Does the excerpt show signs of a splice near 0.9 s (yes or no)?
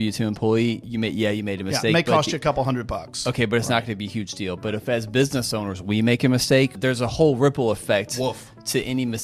yes